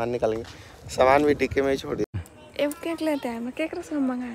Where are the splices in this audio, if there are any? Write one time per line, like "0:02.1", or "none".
0:02.2